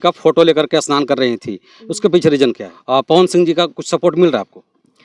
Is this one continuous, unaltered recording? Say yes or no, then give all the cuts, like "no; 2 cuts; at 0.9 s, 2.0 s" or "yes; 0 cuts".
no; 1 cut; at 2.7 s